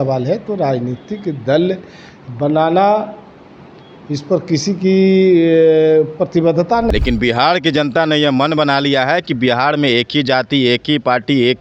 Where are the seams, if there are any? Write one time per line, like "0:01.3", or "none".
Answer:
0:06.9